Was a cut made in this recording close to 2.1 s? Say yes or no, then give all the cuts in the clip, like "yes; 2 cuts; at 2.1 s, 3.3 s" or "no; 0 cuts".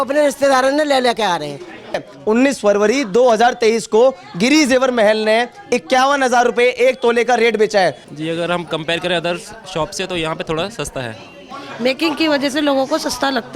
yes; 3 cuts; at 2.1 s, 8.0 s, 11.5 s